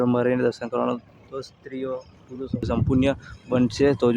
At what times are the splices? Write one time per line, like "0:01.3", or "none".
0:02.7